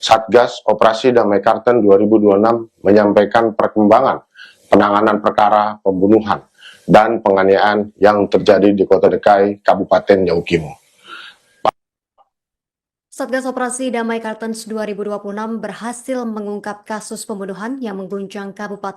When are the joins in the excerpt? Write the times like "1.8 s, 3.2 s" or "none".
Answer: 11.7 s